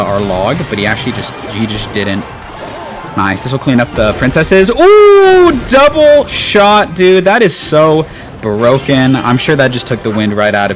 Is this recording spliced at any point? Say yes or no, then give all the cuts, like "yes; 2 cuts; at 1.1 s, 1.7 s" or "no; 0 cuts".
no; 0 cuts